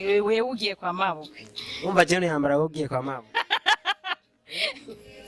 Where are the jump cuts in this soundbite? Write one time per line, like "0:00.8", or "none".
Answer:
none